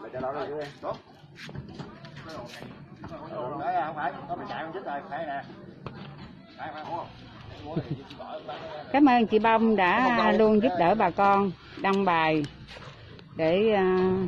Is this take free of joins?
yes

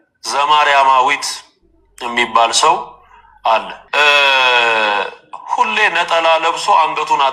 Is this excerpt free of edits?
no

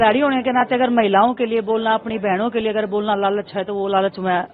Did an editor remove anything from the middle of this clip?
no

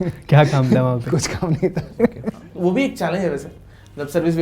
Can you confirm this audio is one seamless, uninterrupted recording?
no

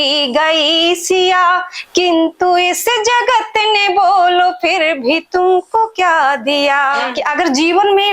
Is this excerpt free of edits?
no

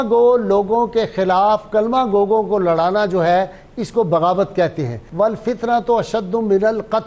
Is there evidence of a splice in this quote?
yes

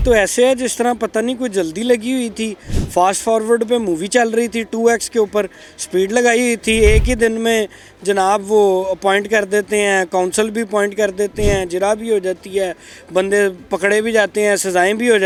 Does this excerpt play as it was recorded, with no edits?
yes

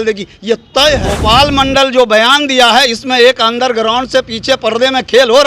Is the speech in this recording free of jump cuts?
no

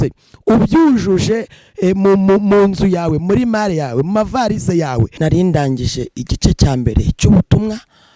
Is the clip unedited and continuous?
no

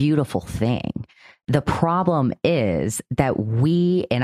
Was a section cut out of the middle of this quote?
no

